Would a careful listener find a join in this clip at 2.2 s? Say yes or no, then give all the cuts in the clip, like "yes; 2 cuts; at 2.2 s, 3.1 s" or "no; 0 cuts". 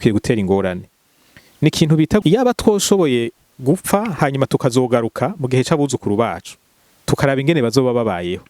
yes; 1 cut; at 2.2 s